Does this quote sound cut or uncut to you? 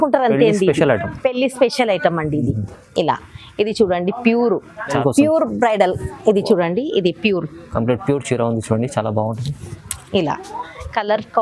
cut